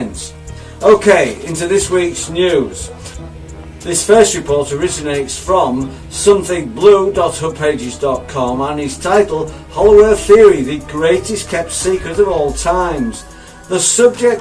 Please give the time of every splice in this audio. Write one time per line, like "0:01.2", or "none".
none